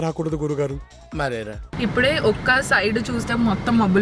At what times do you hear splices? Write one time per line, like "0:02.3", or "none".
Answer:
0:01.7